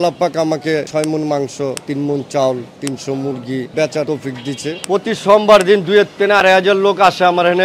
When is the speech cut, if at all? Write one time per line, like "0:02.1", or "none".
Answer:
0:03.7
0:04.8